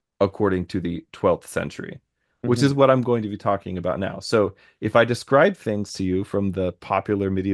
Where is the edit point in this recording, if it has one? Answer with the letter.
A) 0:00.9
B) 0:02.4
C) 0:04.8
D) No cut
D